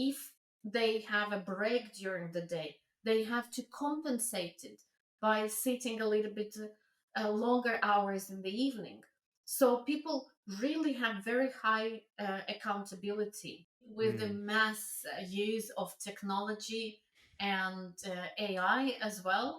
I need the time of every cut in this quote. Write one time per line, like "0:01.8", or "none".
0:13.9

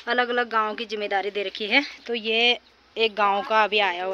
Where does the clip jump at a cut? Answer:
none

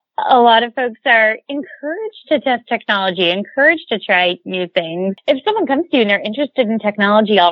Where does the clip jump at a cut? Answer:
0:05.2

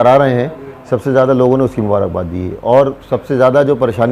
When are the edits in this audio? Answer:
none

